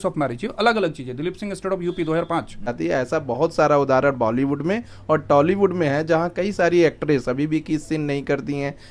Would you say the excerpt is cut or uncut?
cut